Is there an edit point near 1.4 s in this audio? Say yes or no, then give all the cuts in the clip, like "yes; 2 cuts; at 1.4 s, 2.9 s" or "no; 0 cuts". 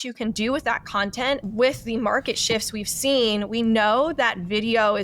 yes; 1 cut; at 1.4 s